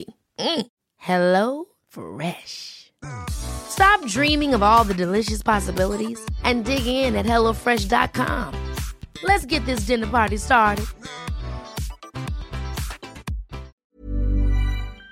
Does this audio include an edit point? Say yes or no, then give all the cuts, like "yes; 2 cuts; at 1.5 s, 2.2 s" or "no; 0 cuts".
yes; 1 cut; at 13.7 s